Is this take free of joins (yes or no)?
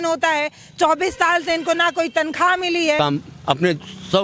no